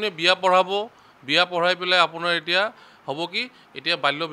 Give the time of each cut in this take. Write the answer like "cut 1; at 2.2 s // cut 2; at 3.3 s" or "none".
none